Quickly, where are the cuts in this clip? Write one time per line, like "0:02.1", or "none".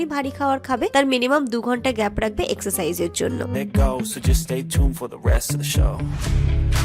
0:03.6